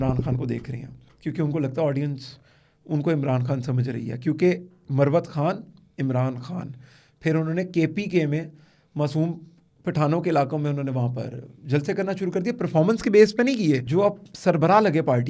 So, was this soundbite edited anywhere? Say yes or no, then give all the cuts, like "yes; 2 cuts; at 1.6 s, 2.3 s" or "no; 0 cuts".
yes; 1 cut; at 13.8 s